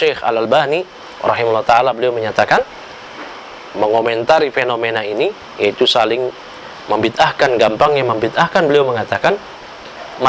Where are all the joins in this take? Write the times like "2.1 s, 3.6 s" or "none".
none